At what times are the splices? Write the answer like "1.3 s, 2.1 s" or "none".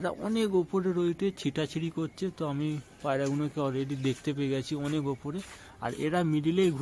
none